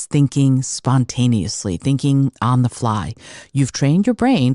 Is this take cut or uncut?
uncut